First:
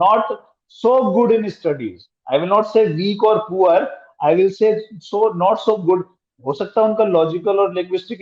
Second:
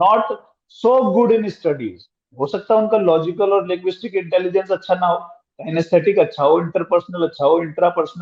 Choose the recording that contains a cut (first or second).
second